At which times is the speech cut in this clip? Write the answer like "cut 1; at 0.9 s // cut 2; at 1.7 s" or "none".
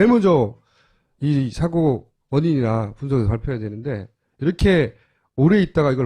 cut 1; at 2.5 s